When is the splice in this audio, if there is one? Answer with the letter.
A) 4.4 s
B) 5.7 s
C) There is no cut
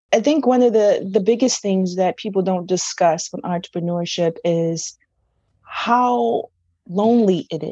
C